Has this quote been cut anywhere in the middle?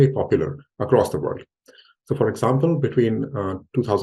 no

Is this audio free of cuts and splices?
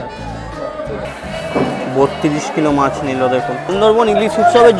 no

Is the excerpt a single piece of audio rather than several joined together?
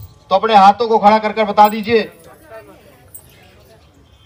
yes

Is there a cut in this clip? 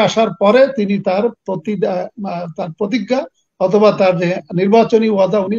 no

